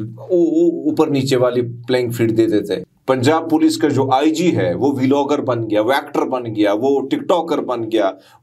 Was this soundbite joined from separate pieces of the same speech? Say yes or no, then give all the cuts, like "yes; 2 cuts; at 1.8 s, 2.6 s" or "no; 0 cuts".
yes; 1 cut; at 2.8 s